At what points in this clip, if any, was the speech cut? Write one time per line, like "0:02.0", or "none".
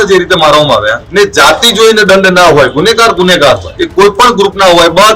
0:01.0
0:03.7